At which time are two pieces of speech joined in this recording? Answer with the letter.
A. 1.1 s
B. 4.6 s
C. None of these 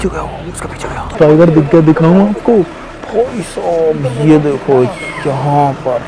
A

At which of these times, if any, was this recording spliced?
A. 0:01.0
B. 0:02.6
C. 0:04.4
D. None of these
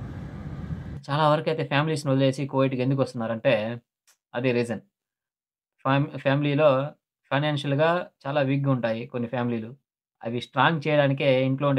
A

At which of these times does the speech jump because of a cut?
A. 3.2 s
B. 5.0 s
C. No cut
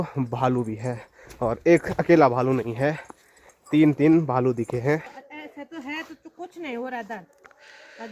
B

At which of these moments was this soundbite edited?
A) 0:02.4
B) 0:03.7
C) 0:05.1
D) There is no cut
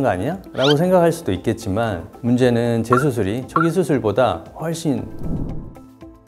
C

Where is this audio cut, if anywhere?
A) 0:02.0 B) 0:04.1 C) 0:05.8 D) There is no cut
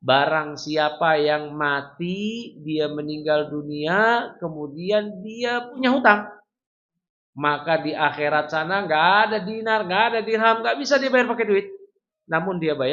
C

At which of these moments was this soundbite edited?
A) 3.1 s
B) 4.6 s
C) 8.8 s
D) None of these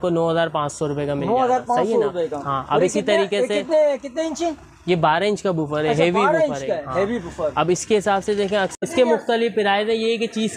C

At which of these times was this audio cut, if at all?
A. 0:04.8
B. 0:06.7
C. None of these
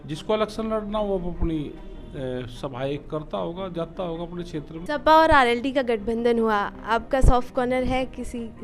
A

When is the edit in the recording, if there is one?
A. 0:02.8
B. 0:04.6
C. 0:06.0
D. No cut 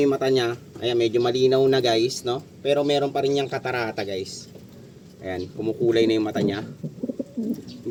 D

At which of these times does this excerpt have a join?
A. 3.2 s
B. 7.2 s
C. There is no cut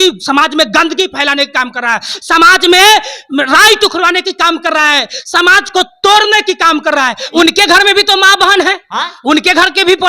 B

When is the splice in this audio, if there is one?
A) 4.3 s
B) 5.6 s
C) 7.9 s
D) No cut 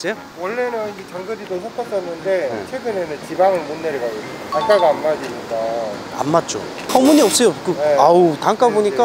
A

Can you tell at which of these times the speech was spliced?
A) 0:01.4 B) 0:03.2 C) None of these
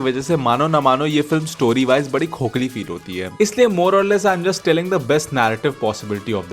B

